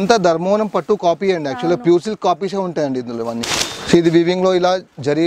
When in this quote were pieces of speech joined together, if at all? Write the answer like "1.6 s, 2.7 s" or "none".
3.4 s